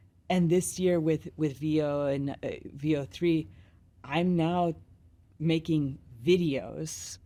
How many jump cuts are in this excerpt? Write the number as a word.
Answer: zero